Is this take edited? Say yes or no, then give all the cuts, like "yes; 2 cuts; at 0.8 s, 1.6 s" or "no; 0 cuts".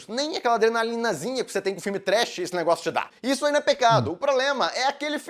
yes; 1 cut; at 3.1 s